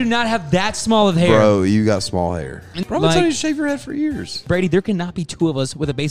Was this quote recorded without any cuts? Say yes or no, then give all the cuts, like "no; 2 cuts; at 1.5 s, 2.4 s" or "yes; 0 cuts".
no; 2 cuts; at 2.7 s, 4.3 s